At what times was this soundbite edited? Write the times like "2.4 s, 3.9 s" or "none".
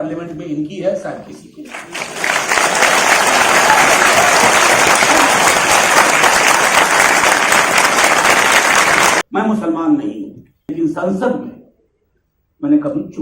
9.2 s, 10.7 s